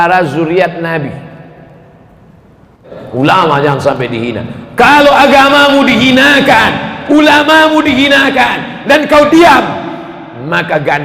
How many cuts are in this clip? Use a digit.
1